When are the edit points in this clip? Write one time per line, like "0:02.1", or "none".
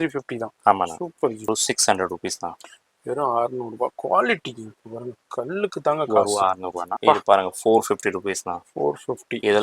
0:01.5
0:06.9